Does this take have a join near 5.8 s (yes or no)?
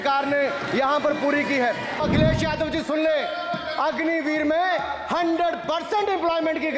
no